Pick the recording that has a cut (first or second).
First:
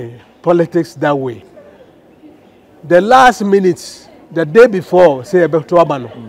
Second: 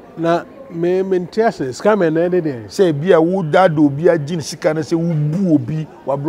first